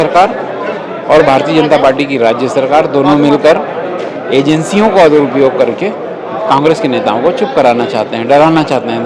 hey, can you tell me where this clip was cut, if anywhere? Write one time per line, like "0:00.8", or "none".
none